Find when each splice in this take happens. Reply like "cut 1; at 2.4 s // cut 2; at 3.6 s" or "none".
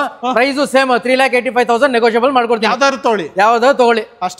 none